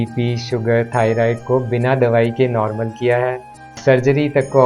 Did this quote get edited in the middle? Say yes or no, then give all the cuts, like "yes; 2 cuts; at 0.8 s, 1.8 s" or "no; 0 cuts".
yes; 1 cut; at 3.6 s